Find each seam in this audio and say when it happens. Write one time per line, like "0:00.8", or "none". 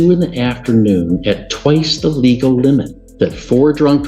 0:03.0